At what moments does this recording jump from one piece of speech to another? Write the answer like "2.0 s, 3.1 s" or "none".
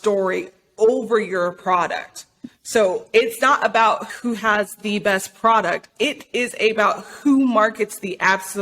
4.1 s, 6.0 s

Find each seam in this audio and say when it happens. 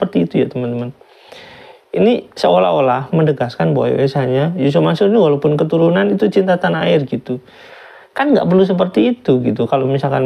none

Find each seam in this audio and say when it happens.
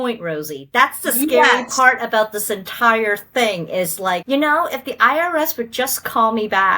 4.2 s

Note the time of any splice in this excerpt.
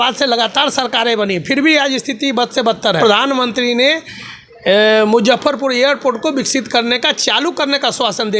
3.0 s

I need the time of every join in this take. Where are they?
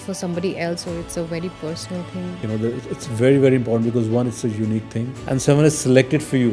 2.4 s, 5.1 s

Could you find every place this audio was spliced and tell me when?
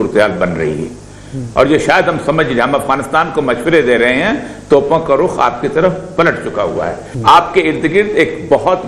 7.0 s

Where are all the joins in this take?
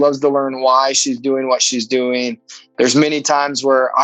none

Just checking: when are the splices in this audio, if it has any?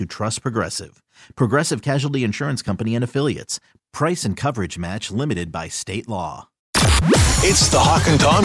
6.6 s

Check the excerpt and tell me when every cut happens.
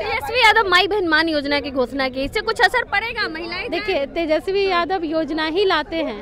none

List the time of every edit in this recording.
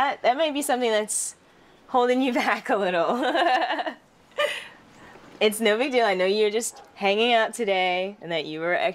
4.3 s

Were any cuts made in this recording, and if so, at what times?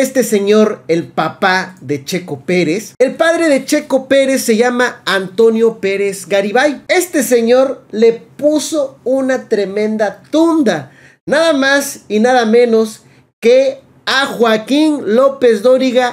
2.9 s, 6.8 s

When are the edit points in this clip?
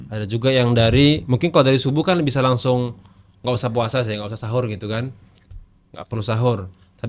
none

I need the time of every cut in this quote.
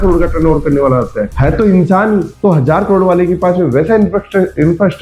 none

